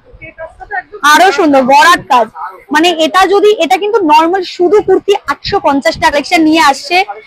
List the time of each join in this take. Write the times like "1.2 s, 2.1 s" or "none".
6.1 s